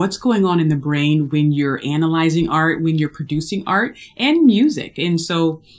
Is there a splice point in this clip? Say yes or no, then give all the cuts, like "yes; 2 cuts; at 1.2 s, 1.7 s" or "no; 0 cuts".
no; 0 cuts